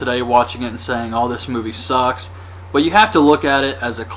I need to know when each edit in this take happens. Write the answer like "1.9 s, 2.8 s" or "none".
none